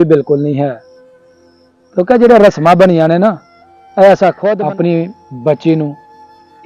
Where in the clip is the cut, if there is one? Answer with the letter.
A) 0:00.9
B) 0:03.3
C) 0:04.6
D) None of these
C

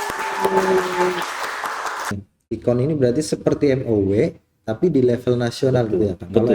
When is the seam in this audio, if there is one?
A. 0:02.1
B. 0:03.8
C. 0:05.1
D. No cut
A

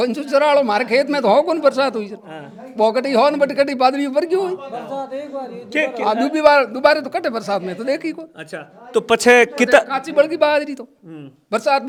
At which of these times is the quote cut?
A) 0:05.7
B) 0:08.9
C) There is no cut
C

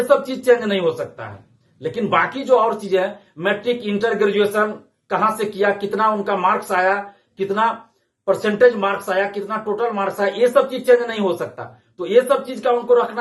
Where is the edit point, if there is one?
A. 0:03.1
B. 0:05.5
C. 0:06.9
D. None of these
D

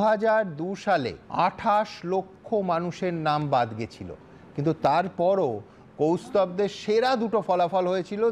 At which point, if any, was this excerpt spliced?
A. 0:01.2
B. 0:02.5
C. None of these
A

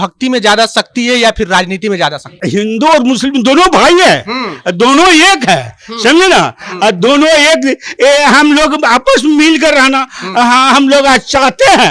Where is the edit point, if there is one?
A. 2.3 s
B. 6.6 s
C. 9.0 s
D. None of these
A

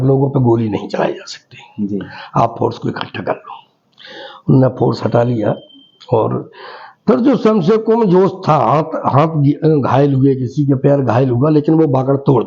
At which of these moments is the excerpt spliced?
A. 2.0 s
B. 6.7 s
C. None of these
C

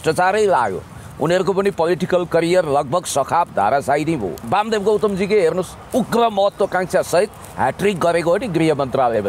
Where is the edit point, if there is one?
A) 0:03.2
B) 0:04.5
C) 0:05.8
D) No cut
B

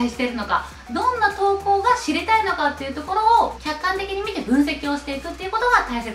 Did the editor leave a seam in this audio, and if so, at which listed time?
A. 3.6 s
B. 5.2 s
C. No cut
A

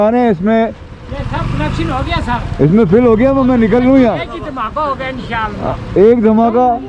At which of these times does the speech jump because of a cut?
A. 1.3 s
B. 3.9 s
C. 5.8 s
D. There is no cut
D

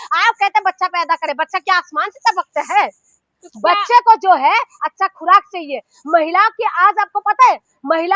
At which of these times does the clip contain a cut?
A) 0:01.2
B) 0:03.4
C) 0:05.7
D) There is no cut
D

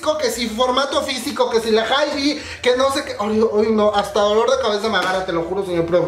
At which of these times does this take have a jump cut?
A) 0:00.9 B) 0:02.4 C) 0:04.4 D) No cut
D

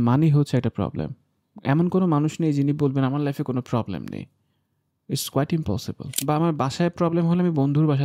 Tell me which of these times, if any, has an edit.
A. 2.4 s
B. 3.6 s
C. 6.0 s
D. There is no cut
C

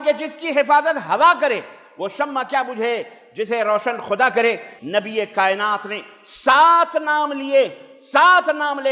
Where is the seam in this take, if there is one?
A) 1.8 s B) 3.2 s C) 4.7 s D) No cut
C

